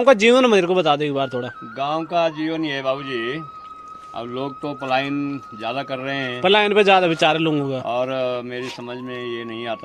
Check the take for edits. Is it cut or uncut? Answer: uncut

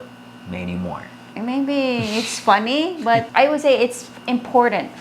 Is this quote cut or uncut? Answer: cut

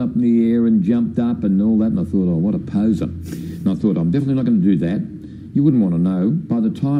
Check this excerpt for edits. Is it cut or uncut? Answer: uncut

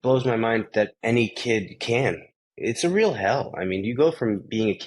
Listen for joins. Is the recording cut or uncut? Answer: cut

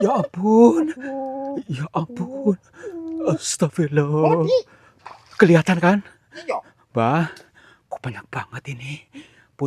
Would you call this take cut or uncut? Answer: uncut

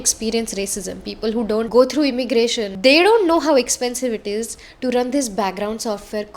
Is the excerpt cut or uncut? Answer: cut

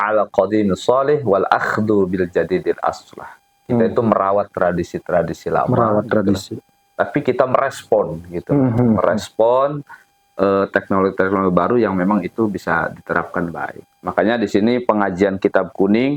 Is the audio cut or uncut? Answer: uncut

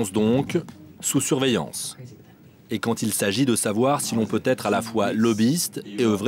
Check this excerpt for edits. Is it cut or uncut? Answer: uncut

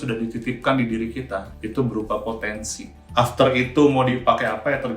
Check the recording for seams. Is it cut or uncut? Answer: cut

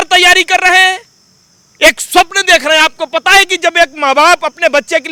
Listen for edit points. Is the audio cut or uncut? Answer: uncut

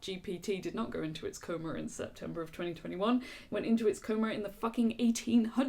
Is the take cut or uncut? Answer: uncut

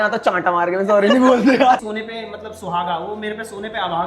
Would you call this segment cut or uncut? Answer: cut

